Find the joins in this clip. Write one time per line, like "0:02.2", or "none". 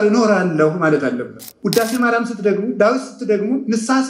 0:01.5